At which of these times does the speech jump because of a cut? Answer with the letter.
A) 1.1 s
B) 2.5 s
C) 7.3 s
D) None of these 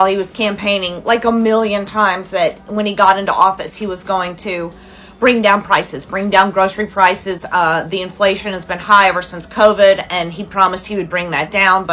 D